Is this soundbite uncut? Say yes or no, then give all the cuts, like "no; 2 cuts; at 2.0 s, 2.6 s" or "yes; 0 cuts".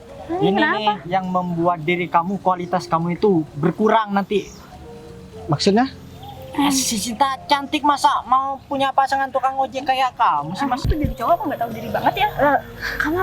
no; 1 cut; at 10.8 s